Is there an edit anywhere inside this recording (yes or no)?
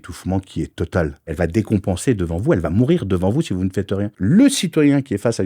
yes